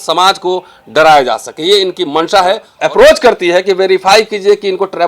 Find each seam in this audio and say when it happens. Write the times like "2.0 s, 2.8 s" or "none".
2.7 s